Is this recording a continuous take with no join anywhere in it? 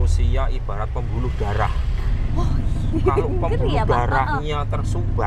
yes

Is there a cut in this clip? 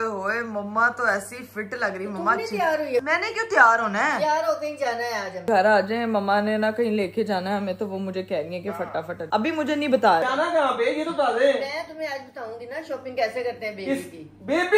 yes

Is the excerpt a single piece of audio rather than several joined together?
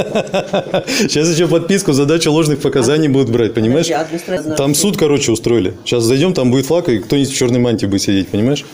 no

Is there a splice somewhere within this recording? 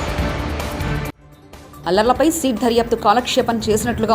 yes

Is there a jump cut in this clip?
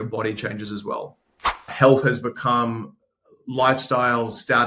yes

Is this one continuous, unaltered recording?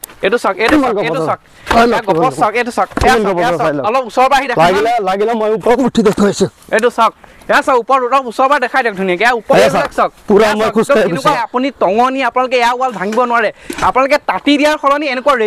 no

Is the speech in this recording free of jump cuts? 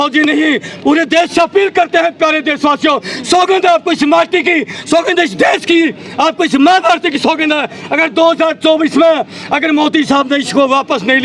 yes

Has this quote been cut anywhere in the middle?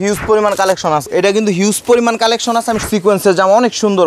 yes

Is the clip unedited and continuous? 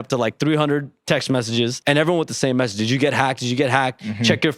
no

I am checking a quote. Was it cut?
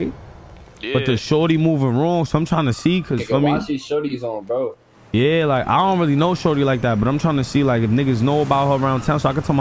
no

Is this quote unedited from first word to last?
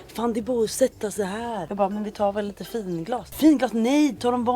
no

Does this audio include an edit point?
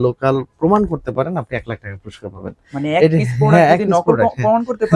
no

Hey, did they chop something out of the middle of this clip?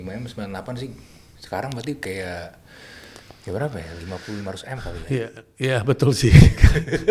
no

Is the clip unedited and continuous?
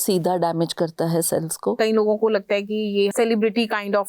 no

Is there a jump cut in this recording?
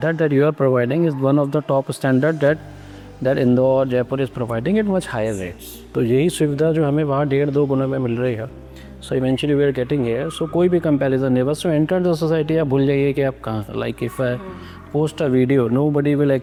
no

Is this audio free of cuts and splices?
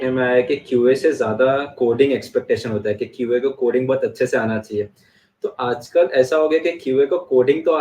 yes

